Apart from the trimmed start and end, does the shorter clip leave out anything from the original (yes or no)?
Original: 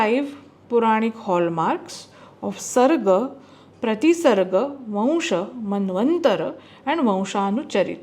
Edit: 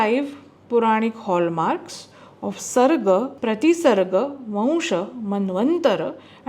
yes